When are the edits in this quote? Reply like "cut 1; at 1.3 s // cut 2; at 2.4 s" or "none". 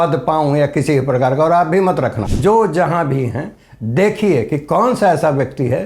cut 1; at 2.2 s

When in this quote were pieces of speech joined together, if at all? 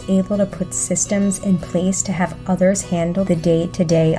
none

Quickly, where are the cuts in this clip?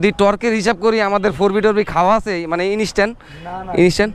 none

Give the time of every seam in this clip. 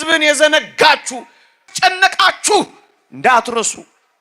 cut 1; at 1.7 s

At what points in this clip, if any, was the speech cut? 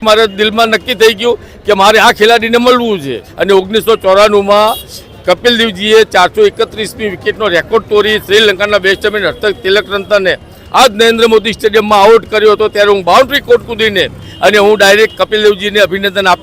cut 1; at 3.3 s // cut 2; at 14.2 s

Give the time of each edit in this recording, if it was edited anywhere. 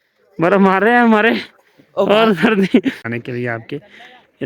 cut 1; at 3.1 s

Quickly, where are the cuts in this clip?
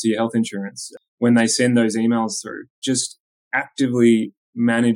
cut 1; at 0.9 s // cut 2; at 2.8 s

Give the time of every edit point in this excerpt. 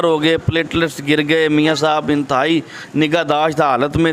none

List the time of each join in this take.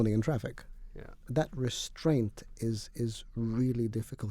cut 1; at 1.2 s

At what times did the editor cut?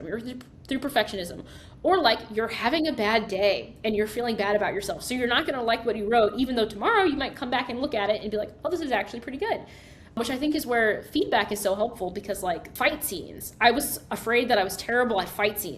cut 1; at 10.2 s // cut 2; at 12.7 s

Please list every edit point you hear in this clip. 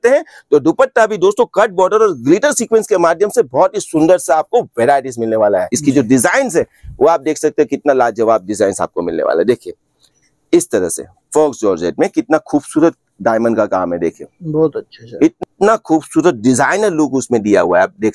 cut 1; at 5.7 s // cut 2; at 15.4 s

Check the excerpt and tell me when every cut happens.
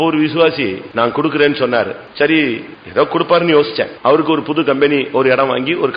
cut 1; at 0.8 s // cut 2; at 2.0 s // cut 3; at 2.7 s // cut 4; at 3.9 s

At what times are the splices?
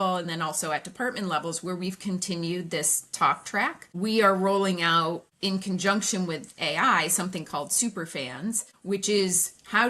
cut 1; at 3.8 s // cut 2; at 5.3 s // cut 3; at 8.7 s

